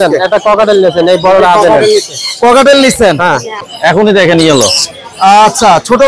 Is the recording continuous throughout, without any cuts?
no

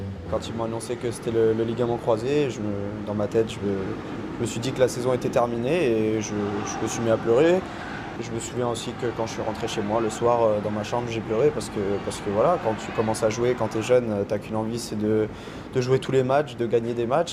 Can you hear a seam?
no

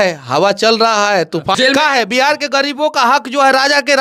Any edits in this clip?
yes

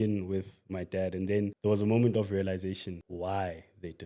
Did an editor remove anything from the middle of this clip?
yes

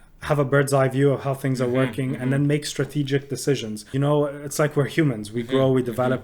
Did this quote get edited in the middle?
yes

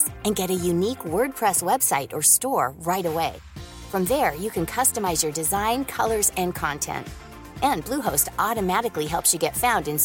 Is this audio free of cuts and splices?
yes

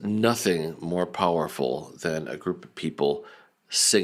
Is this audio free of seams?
yes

